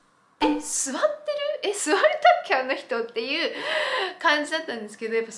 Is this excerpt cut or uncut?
uncut